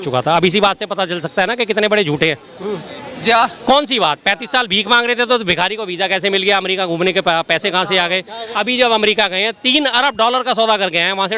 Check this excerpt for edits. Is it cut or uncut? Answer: cut